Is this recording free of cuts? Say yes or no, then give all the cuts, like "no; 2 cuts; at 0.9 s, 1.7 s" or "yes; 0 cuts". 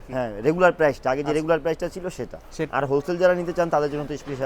no; 1 cut; at 2.7 s